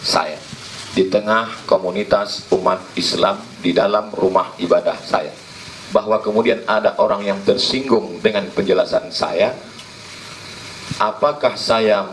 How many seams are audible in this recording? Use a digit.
0